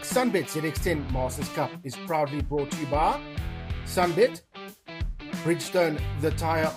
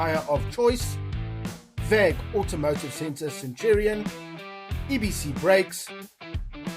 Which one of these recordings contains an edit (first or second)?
second